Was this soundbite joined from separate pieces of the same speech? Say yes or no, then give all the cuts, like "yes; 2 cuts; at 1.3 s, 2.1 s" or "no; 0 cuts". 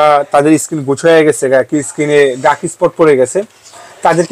no; 0 cuts